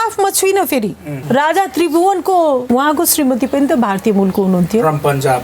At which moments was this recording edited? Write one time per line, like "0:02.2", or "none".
0:01.1
0:02.6